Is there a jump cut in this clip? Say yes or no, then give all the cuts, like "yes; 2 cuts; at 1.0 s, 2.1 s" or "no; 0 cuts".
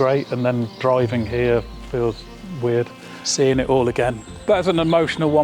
yes; 1 cut; at 4.2 s